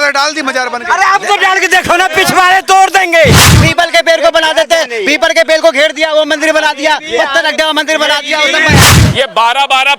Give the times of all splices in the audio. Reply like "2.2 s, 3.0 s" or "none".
3.6 s, 8.9 s